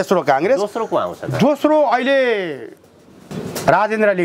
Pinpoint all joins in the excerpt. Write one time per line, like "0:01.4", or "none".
0:03.3